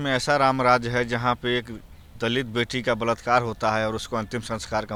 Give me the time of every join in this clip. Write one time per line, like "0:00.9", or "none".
none